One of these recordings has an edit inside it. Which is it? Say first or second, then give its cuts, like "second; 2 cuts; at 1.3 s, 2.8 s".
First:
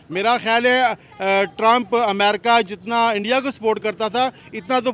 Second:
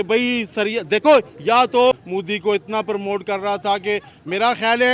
second; 1 cut; at 2.0 s